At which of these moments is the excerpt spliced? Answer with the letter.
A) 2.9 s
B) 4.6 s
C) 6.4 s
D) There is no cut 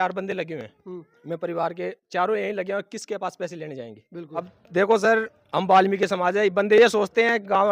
B